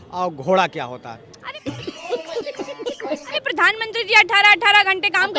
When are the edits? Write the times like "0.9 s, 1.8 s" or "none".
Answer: 1.6 s, 3.3 s

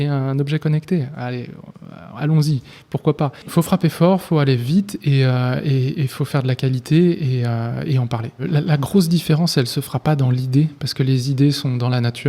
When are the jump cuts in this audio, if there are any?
3.5 s, 8.4 s

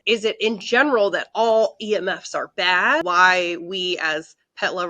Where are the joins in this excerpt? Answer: 3.0 s

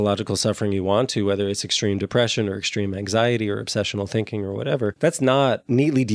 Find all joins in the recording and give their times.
5.0 s

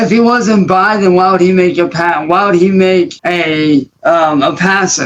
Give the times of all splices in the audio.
none

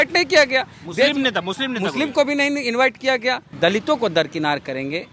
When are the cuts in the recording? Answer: 3.5 s

